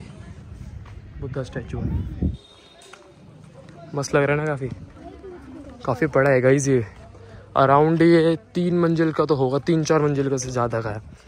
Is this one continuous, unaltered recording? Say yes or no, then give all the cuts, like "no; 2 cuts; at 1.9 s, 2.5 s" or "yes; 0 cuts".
yes; 0 cuts